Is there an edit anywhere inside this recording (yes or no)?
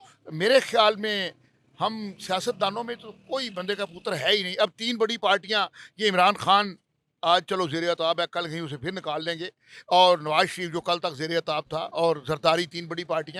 no